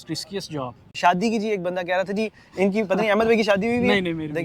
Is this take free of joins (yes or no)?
no